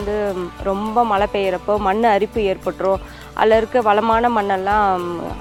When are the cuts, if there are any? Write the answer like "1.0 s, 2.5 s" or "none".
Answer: none